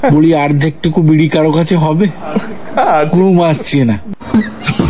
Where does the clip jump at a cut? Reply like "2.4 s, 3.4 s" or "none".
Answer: none